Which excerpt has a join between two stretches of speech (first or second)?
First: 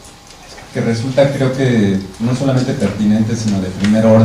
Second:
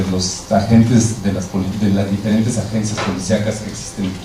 first